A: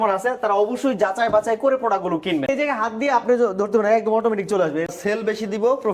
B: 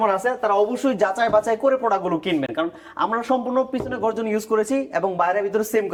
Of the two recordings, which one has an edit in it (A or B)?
A